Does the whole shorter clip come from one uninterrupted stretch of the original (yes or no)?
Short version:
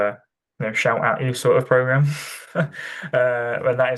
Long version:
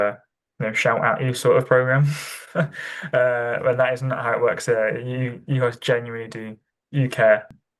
yes